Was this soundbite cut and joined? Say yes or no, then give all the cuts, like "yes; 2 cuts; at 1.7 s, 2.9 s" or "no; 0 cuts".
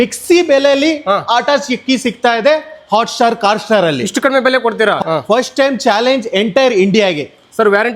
no; 0 cuts